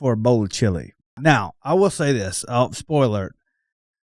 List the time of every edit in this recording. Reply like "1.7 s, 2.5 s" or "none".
1.2 s